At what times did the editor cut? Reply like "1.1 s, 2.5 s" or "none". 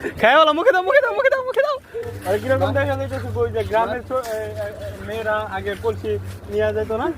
2.1 s